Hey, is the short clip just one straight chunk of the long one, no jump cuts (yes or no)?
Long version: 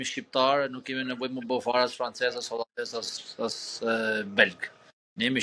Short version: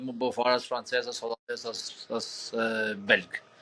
yes